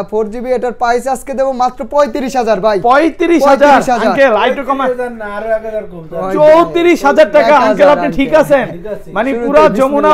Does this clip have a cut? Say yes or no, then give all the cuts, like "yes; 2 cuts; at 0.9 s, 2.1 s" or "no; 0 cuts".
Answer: no; 0 cuts